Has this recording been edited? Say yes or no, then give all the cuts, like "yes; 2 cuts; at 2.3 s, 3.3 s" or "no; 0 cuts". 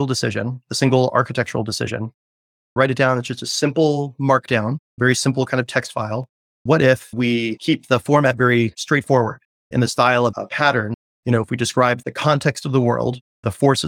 yes; 2 cuts; at 2.5 s, 11.0 s